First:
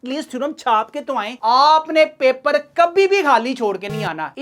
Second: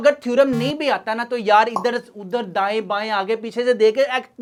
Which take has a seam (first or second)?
first